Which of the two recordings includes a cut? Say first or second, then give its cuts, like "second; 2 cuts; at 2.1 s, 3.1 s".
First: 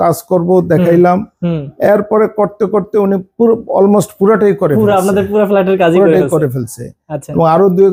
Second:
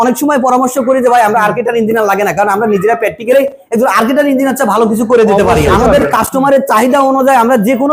second; 1 cut; at 5.7 s